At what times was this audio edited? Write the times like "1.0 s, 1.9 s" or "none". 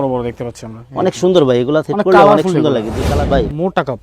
3.0 s